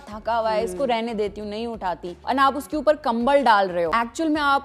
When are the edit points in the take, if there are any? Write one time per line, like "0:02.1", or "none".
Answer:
0:02.1
0:03.9

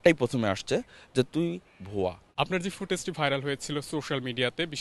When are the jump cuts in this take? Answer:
0:02.3

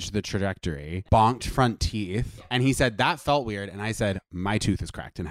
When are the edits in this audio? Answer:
0:00.9
0:02.4

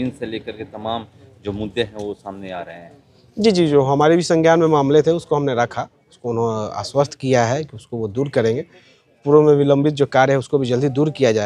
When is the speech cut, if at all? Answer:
none

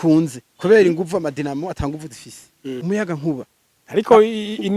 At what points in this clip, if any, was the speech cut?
0:02.8

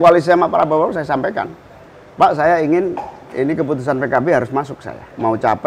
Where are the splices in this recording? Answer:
none

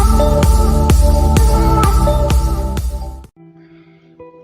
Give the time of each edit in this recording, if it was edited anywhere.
0:03.3

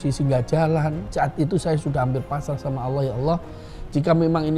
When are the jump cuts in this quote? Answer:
0:01.0

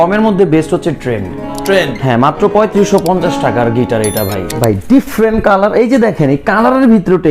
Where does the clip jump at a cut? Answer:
0:04.5

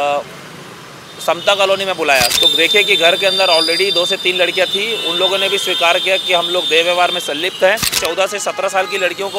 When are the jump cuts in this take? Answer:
0:02.3
0:07.9

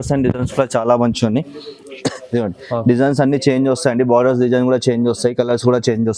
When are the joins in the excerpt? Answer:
none

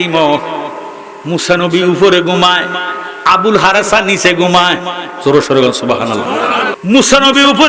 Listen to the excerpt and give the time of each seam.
0:06.7

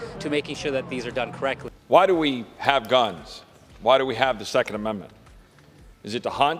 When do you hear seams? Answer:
0:01.7

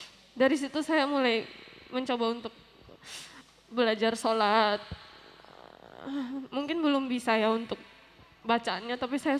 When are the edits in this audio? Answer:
none

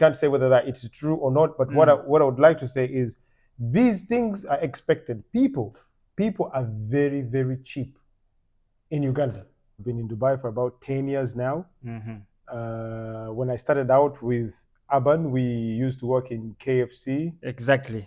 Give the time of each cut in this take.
0:09.7

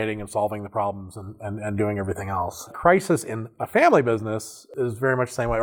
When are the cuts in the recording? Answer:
0:02.7
0:04.7

